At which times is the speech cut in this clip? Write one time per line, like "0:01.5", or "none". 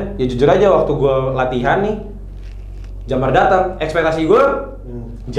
none